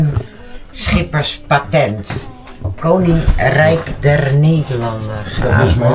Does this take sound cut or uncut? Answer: uncut